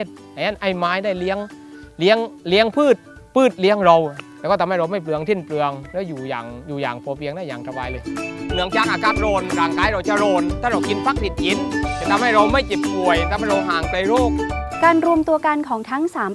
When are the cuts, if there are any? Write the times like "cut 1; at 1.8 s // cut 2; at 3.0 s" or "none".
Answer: none